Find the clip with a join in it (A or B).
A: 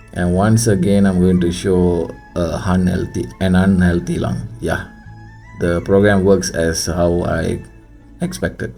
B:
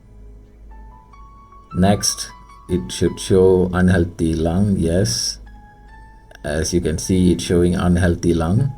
B